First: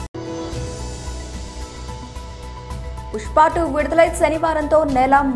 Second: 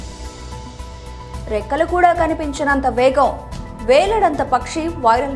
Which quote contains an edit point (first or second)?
first